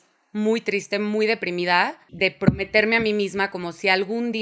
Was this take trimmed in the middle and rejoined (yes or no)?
yes